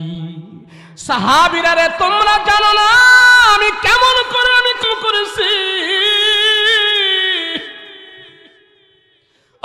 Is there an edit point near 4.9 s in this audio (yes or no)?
yes